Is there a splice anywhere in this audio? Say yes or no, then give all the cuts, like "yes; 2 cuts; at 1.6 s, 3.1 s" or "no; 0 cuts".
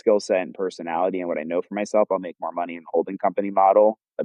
no; 0 cuts